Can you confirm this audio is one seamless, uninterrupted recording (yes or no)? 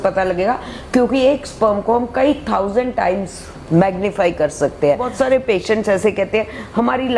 no